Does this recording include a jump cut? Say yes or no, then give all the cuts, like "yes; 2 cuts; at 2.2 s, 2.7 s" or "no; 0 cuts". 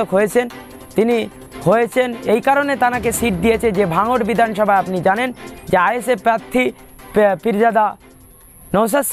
no; 0 cuts